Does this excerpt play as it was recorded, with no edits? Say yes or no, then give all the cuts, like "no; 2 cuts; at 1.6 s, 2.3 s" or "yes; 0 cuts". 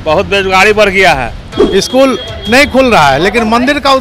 no; 1 cut; at 1.6 s